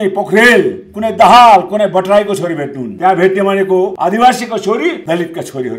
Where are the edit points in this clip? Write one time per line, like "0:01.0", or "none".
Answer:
0:02.8
0:03.9
0:05.0